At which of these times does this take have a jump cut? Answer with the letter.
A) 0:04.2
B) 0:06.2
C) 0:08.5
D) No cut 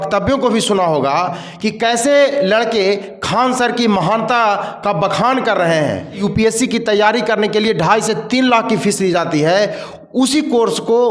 B